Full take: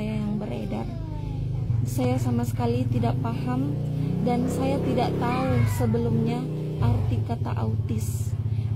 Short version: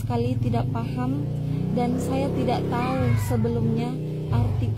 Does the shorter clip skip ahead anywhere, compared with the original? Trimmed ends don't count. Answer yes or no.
no